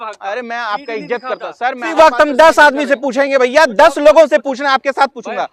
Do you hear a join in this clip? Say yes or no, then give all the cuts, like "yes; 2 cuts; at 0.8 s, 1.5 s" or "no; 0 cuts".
yes; 1 cut; at 1.8 s